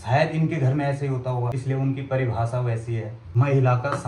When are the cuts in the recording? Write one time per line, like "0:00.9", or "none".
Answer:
0:01.6
0:03.2